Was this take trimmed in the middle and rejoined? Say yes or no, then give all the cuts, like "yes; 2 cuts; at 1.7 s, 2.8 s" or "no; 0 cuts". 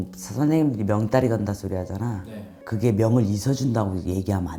no; 0 cuts